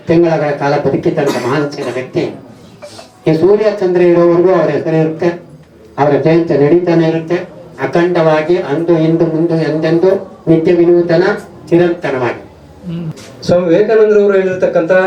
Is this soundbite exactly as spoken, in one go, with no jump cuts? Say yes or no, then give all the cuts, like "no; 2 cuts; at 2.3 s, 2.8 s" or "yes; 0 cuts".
no; 1 cut; at 13.1 s